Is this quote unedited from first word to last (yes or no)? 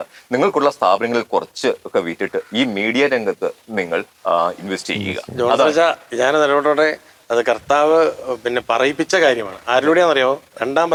yes